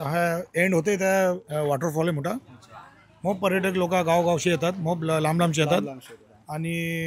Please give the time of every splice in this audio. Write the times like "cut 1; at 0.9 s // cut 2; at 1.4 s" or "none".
none